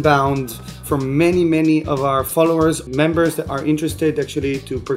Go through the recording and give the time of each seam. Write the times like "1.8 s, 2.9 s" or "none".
0.8 s, 2.8 s